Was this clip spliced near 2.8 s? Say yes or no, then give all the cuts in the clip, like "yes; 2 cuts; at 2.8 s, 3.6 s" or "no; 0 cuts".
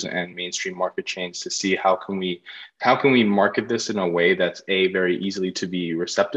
no; 0 cuts